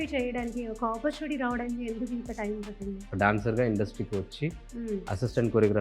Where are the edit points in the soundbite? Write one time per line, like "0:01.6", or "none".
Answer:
0:03.1